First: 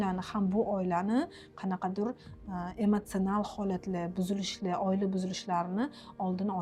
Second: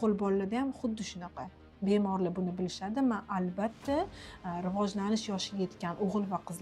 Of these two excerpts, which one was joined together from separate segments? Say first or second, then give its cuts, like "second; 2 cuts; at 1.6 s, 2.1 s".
second; 1 cut; at 1.6 s